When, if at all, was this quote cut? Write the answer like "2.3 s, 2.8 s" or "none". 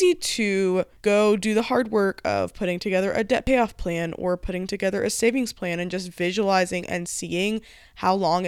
0.9 s